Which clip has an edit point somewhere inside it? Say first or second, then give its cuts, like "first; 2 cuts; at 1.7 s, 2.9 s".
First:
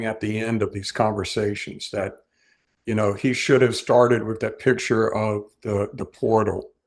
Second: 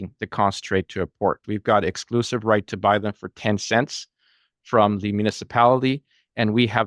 second; 1 cut; at 1.4 s